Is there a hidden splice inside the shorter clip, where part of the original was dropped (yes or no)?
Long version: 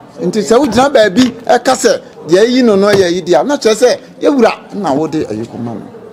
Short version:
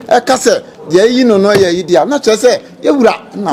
no